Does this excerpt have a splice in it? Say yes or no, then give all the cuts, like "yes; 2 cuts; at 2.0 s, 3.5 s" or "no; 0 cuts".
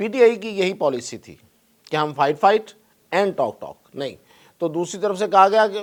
no; 0 cuts